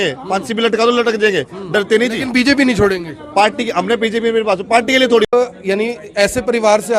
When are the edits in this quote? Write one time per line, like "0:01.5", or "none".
0:05.3